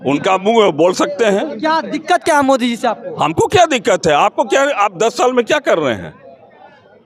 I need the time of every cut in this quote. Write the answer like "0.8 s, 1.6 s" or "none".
none